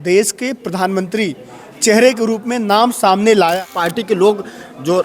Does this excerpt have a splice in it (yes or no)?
yes